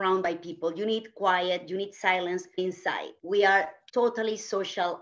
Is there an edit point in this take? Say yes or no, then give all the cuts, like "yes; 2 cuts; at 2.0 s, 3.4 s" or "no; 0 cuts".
yes; 2 cuts; at 2.6 s, 3.8 s